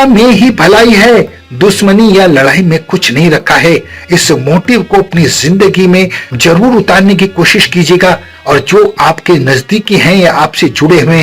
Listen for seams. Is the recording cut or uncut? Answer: cut